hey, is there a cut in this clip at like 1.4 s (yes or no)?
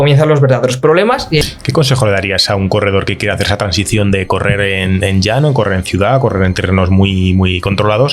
yes